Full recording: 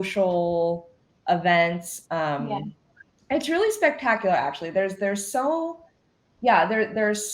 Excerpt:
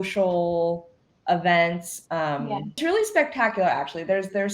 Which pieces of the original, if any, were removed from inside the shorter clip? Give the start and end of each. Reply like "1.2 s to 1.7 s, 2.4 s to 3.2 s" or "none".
2.8 s to 3.4 s